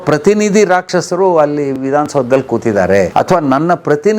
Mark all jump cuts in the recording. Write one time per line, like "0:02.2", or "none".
0:03.1